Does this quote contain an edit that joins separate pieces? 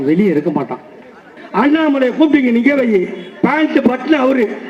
yes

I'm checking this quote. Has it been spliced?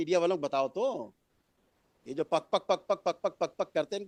no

